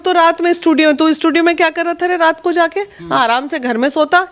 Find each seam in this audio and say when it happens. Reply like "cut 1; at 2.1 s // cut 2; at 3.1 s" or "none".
none